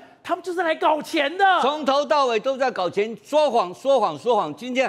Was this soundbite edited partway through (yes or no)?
no